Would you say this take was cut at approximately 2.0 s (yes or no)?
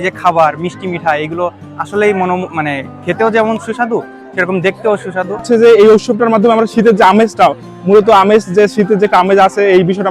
no